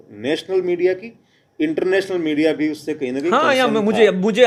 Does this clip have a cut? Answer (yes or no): no